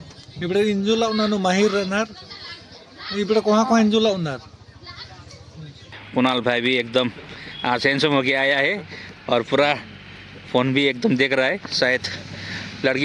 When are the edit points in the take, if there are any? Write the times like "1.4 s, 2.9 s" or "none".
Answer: 6.0 s